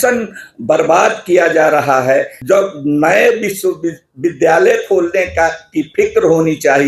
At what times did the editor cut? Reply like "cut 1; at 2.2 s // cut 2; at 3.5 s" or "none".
cut 1; at 2.3 s